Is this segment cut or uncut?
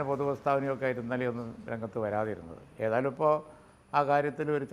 uncut